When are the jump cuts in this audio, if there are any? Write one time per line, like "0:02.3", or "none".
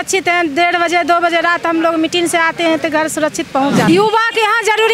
0:03.8